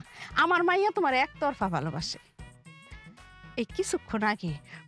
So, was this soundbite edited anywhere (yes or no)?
no